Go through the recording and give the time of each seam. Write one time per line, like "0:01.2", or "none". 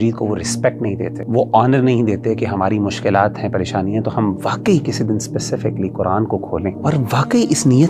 0:01.2
0:06.8